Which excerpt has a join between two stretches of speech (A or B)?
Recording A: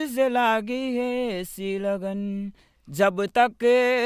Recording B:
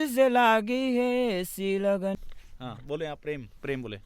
B